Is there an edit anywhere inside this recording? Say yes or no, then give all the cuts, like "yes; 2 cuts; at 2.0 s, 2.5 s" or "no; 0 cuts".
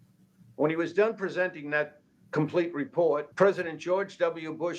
yes; 1 cut; at 3.3 s